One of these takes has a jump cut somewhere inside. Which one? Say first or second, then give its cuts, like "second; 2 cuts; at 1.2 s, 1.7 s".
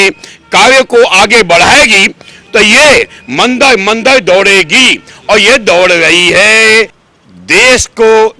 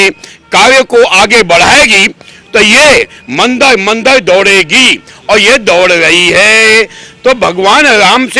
first; 1 cut; at 7.0 s